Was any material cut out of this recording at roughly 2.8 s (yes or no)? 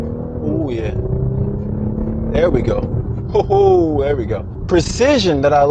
no